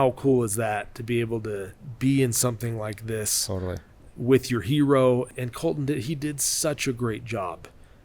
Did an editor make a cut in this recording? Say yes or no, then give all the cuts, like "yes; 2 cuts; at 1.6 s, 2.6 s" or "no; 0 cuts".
yes; 2 cuts; at 1.8 s, 5.3 s